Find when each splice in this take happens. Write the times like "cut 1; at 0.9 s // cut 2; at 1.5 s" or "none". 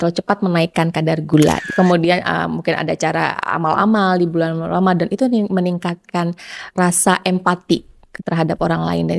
cut 1; at 1.7 s // cut 2; at 6.7 s